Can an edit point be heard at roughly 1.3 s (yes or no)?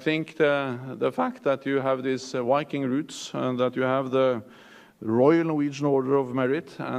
no